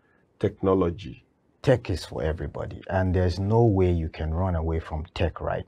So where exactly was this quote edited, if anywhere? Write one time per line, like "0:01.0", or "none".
0:01.6